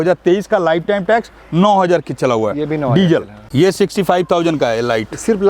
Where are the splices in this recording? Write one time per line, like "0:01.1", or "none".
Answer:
0:03.4